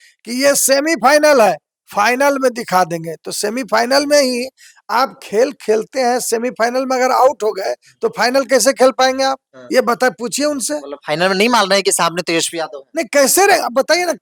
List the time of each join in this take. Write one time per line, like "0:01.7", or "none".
none

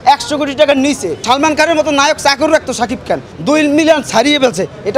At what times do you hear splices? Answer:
0:01.1
0:03.3

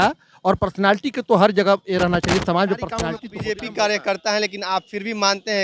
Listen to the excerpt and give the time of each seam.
0:03.2

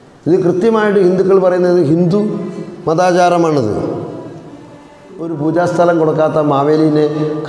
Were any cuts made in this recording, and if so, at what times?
0:05.3

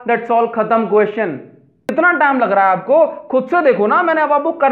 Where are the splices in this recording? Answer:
0:01.8

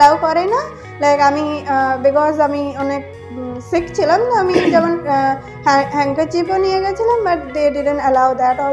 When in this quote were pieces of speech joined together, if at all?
none

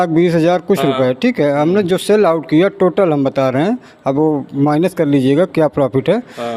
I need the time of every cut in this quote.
none

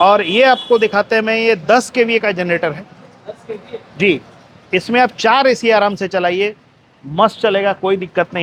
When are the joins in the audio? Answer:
none

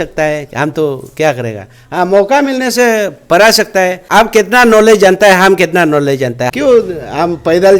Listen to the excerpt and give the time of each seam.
0:04.0
0:06.5

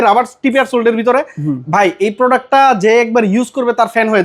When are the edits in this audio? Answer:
none

